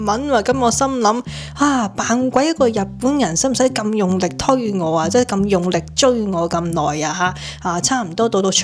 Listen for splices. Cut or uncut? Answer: uncut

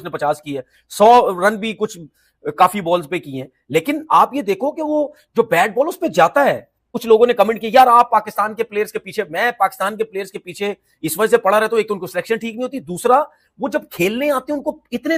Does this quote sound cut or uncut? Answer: uncut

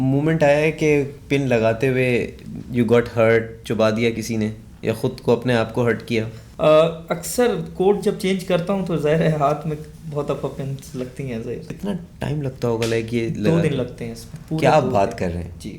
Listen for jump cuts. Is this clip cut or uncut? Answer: cut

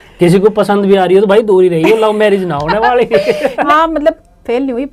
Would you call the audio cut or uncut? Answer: cut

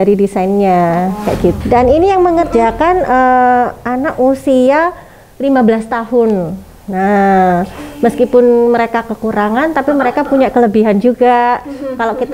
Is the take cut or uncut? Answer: cut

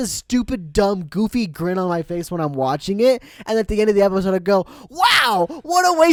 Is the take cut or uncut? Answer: uncut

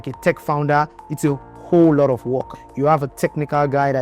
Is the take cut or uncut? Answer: cut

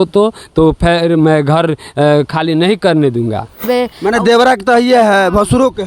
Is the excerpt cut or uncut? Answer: cut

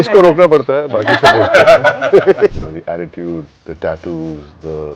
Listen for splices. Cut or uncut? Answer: cut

